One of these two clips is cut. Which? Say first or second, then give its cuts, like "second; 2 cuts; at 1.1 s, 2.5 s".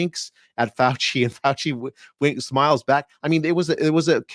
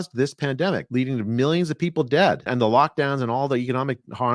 second; 2 cuts; at 0.8 s, 2.5 s